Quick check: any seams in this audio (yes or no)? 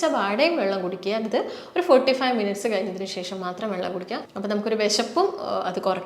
yes